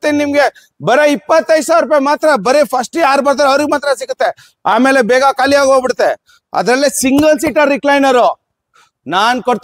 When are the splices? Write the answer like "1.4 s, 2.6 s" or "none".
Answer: none